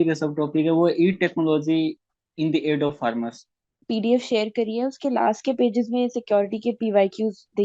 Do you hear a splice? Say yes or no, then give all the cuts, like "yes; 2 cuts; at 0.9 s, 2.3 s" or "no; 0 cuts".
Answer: yes; 1 cut; at 3.9 s